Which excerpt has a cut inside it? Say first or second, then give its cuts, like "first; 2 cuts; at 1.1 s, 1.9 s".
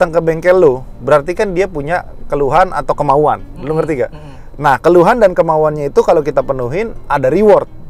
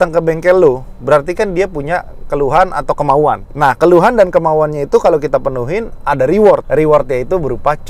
second; 2 cuts; at 3.5 s, 6.7 s